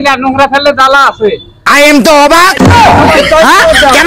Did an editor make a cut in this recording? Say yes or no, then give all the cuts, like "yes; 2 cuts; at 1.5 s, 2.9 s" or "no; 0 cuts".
yes; 1 cut; at 1.4 s